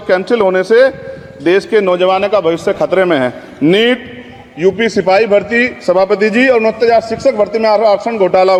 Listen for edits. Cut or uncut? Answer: uncut